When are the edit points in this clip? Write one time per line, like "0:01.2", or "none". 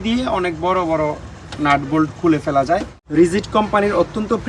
0:03.0